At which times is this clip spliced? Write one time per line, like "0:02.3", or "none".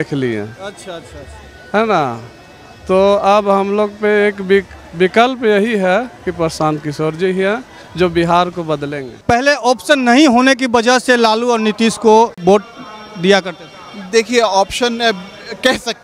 0:09.2
0:12.4